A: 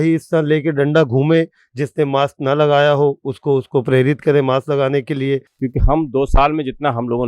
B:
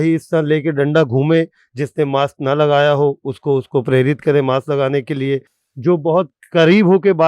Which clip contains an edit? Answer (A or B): A